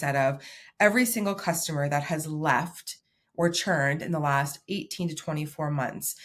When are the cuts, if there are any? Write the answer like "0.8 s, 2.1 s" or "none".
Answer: none